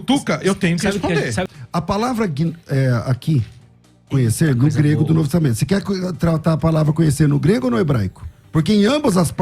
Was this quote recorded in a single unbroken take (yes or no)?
no